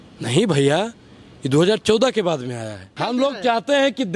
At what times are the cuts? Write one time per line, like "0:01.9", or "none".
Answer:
0:02.9

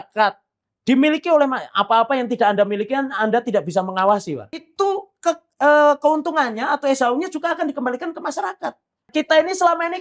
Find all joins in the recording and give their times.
0:04.7
0:09.1

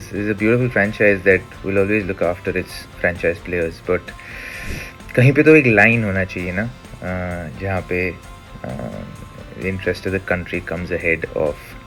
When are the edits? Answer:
none

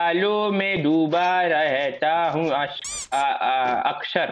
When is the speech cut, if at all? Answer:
none

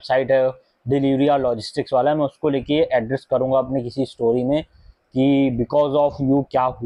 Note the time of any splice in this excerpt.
none

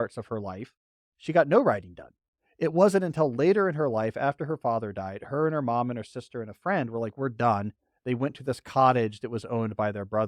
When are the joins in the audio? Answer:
none

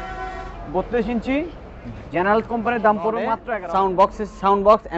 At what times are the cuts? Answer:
0:03.4

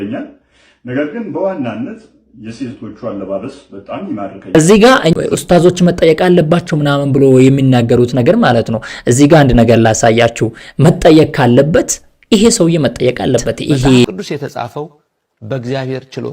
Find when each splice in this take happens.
0:04.5
0:14.0

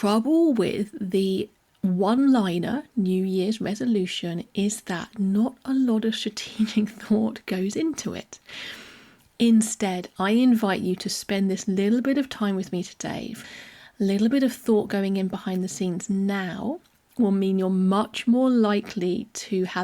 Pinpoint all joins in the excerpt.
0:13.3

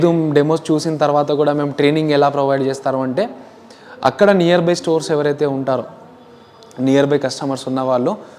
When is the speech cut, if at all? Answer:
none

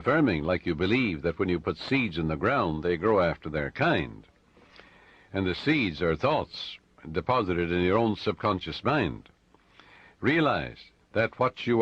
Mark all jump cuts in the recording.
0:06.2

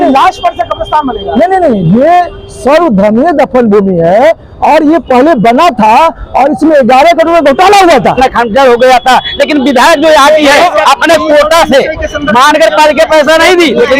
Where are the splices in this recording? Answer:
0:08.1

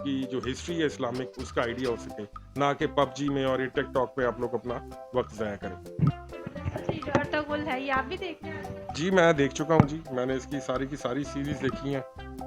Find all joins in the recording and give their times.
none

